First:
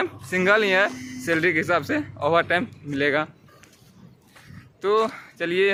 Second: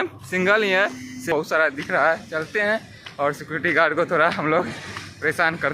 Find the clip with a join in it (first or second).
second